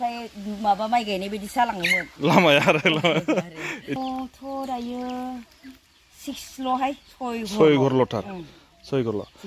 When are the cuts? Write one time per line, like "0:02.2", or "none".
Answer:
0:04.0